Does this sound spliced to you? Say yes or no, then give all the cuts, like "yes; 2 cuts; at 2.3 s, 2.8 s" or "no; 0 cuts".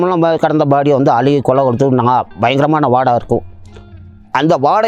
no; 0 cuts